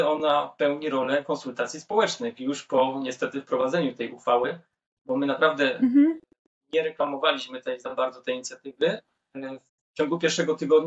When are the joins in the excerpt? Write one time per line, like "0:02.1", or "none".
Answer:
none